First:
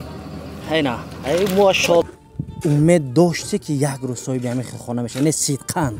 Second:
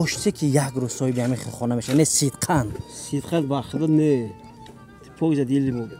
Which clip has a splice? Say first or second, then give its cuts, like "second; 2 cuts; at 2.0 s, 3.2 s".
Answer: first; 1 cut; at 2.0 s